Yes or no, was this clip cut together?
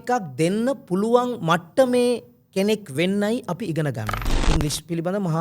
yes